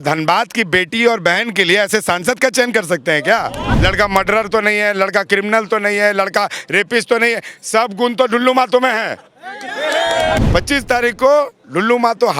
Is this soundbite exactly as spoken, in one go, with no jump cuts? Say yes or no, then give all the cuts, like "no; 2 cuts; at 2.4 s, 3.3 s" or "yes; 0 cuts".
no; 2 cuts; at 3.7 s, 10.4 s